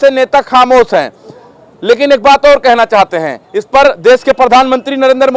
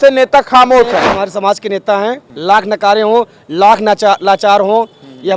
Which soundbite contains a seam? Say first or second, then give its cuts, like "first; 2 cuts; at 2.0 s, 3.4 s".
second; 2 cuts; at 1.1 s, 2.3 s